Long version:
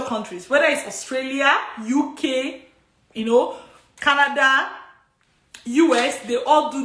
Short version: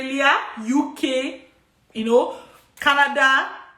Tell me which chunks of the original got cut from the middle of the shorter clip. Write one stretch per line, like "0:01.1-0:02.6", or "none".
none